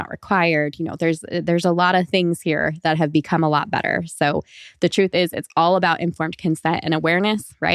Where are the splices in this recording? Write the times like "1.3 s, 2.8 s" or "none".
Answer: none